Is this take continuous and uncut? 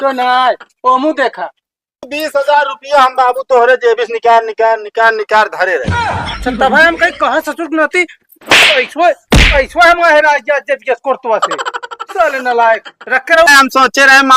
no; 2 cuts; at 2.1 s, 13.5 s

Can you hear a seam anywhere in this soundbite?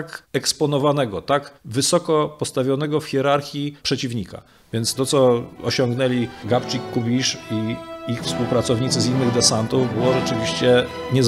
no; 0 cuts

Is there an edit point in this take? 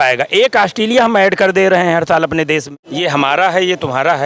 yes; 1 cut; at 2.8 s

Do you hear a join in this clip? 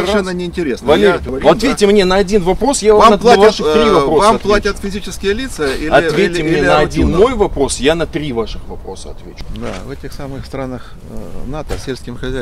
yes; 2 cuts; at 1.3 s, 9.3 s

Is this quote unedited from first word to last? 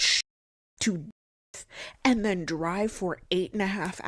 yes; 0 cuts

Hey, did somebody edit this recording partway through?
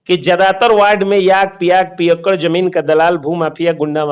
no; 0 cuts

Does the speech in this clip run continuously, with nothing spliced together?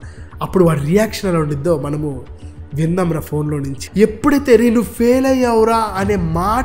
no; 1 cut; at 3.8 s

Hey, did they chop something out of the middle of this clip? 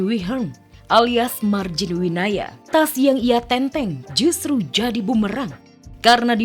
yes; 1 cut; at 2.6 s

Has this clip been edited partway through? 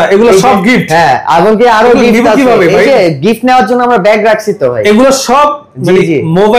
no; 0 cuts

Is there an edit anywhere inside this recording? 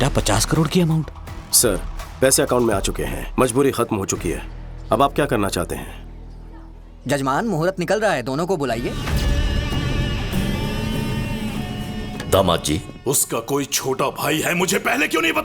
yes; 1 cut; at 9.0 s

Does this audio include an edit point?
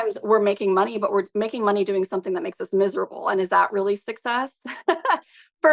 no; 0 cuts

